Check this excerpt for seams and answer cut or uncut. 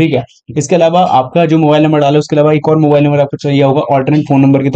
uncut